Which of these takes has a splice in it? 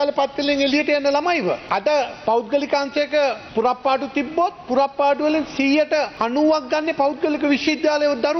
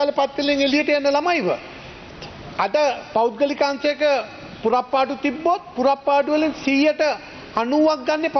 first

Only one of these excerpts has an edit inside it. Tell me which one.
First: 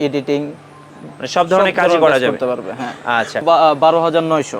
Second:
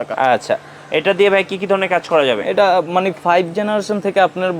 first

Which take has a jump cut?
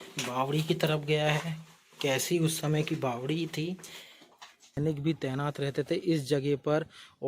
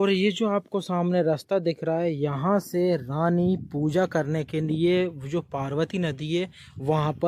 first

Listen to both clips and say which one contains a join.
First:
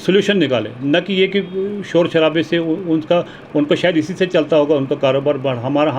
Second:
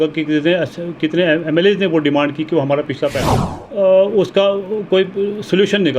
second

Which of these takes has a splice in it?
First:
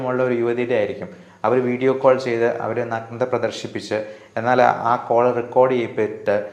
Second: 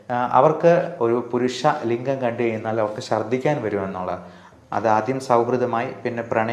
second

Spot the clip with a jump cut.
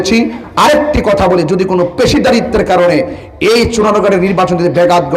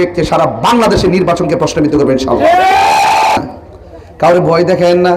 second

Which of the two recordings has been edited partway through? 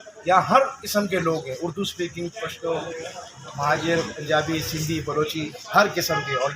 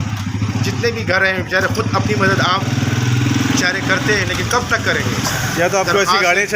second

